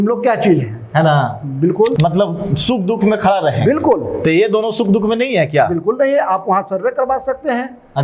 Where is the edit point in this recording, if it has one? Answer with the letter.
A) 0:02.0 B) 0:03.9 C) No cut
A